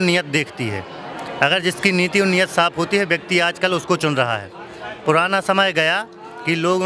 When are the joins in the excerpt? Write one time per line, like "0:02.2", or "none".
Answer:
none